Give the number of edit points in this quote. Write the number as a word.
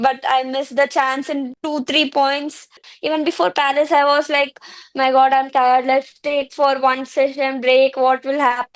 two